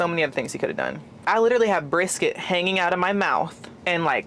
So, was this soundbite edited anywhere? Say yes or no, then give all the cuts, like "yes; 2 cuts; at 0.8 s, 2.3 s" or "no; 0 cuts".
yes; 1 cut; at 1.2 s